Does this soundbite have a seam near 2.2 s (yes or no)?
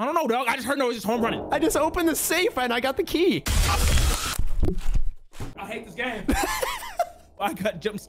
no